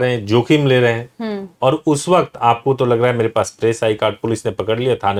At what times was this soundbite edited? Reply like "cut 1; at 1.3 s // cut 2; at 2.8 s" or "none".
none